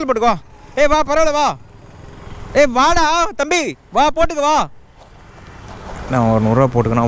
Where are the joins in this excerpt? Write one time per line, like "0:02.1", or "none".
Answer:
none